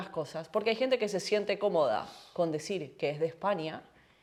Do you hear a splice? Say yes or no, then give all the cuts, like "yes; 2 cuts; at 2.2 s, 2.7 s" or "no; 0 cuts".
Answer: no; 0 cuts